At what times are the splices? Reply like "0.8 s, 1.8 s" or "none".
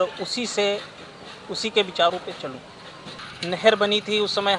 3.2 s